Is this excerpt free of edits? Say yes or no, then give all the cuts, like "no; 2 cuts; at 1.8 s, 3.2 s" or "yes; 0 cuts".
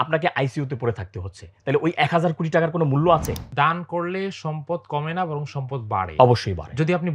no; 1 cut; at 3.4 s